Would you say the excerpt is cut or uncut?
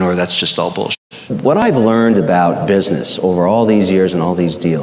cut